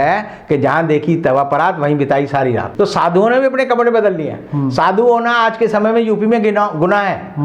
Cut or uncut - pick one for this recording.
cut